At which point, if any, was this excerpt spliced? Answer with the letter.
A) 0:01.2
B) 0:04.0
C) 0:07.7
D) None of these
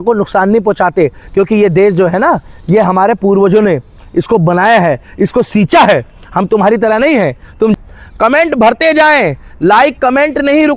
C